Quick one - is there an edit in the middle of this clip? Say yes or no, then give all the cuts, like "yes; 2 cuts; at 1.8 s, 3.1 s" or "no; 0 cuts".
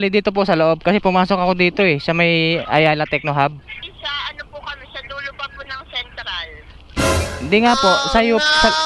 no; 0 cuts